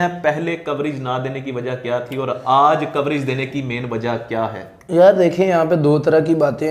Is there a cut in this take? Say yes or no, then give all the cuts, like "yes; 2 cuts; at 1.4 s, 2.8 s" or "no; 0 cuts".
no; 0 cuts